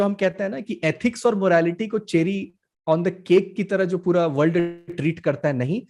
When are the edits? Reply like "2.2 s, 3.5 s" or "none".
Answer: none